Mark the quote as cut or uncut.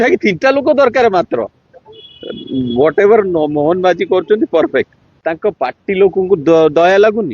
cut